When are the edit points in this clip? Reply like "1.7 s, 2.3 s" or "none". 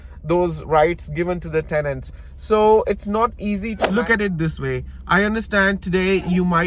3.8 s